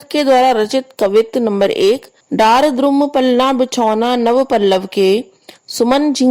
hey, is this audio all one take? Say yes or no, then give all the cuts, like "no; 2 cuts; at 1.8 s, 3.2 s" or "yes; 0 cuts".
no; 1 cut; at 2.2 s